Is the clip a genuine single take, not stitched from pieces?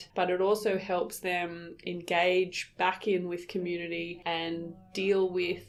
yes; 0 cuts

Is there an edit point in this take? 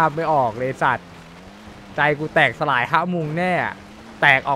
no; 0 cuts

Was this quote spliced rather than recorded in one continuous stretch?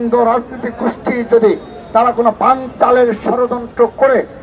no; 0 cuts

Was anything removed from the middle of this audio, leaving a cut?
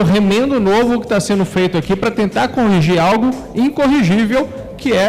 no; 0 cuts

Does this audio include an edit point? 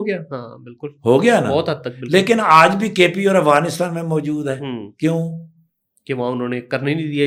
no; 0 cuts

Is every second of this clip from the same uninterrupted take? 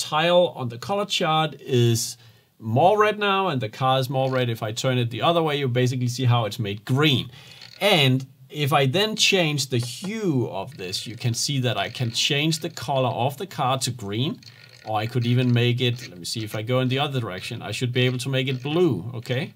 yes; 0 cuts

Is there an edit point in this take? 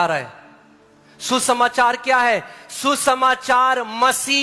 no; 0 cuts

